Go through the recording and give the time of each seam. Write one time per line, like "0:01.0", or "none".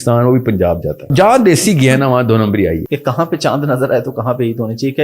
0:01.1
0:02.9